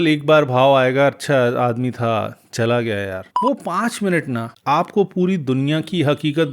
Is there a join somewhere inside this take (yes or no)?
yes